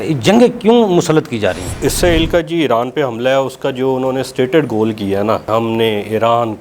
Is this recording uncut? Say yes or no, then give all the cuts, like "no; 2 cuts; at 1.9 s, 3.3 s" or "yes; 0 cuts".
no; 2 cuts; at 1.8 s, 5.5 s